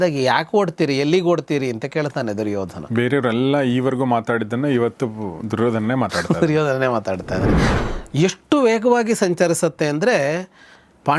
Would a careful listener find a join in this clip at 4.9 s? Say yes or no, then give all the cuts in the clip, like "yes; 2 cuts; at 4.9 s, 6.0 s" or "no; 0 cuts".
no; 2 cuts; at 2.8 s, 7.7 s